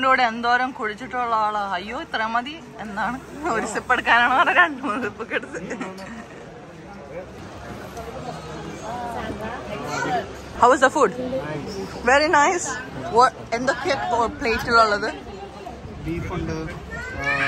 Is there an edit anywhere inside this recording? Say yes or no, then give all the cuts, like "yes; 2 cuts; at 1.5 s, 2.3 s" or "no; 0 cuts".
yes; 2 cuts; at 7.4 s, 10.5 s